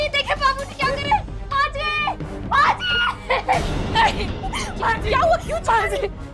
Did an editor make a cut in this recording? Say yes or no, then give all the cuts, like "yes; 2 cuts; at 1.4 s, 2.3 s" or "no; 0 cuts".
no; 0 cuts